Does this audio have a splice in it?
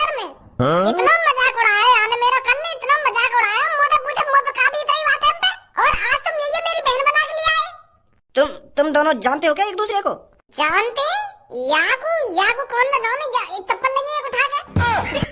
yes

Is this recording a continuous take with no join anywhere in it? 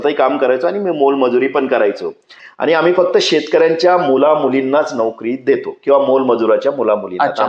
no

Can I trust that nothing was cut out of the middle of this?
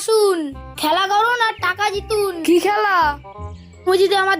no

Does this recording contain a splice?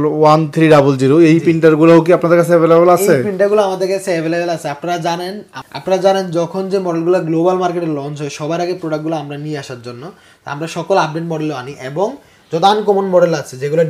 no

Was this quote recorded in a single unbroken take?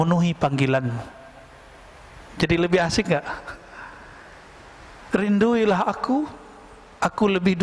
yes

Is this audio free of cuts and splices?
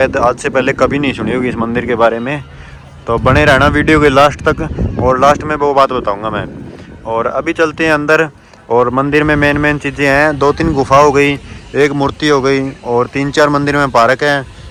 yes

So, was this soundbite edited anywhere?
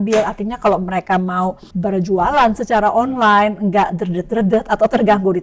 yes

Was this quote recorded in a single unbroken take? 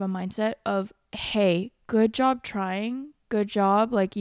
yes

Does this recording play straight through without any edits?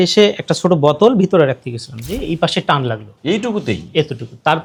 yes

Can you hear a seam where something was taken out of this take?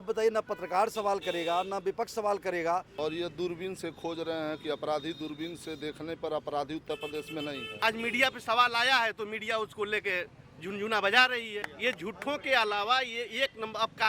yes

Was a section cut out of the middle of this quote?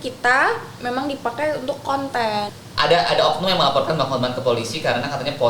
yes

